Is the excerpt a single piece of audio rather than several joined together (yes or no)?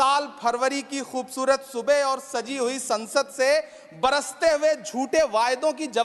yes